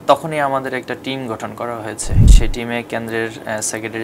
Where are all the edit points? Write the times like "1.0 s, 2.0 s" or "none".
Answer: 2.3 s